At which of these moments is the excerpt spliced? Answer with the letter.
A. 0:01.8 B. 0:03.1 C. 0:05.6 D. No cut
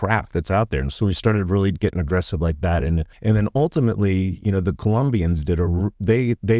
B